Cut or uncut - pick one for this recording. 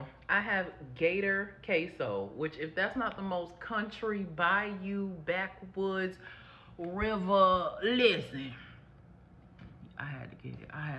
uncut